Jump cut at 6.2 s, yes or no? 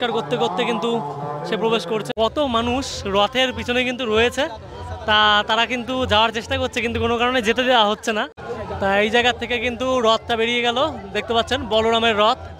no